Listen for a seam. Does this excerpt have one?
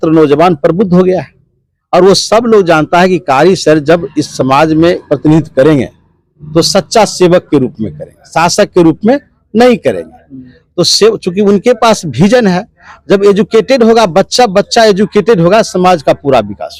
no; 0 cuts

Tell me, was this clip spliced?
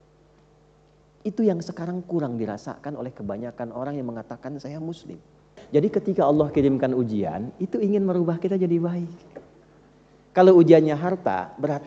yes; 1 cut; at 5.6 s

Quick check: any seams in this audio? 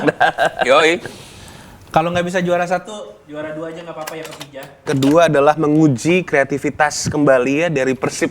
yes; 1 cut; at 4.9 s

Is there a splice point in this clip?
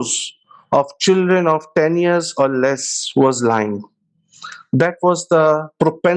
no; 0 cuts

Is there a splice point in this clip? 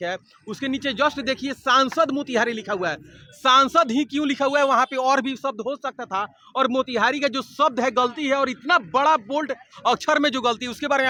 no; 0 cuts

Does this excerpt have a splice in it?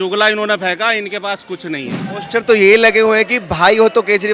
yes; 1 cut; at 2.1 s

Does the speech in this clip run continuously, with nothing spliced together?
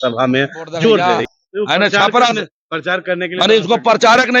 no; 1 cut; at 1.0 s

